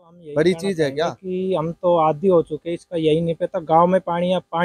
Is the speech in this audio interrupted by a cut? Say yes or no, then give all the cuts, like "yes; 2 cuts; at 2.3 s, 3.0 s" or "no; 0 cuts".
yes; 1 cut; at 1.2 s